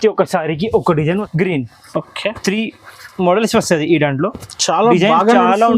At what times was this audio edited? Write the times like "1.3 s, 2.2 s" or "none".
1.3 s